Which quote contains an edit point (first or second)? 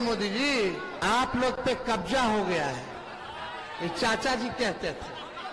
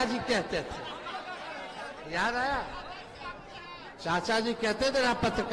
first